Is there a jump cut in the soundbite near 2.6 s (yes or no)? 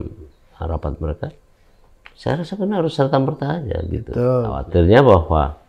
no